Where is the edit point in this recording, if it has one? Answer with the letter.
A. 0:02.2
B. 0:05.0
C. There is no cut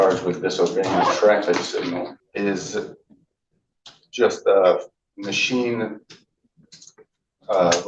A